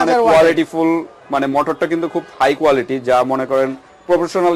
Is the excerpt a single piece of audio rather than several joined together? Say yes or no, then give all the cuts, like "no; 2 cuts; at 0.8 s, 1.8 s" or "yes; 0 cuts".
yes; 0 cuts